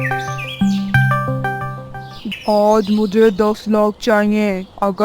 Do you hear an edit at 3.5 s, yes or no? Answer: no